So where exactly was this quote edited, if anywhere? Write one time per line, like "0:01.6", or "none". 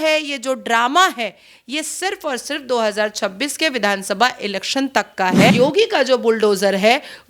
0:05.5